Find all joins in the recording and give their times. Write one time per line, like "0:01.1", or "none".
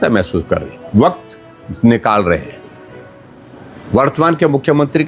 none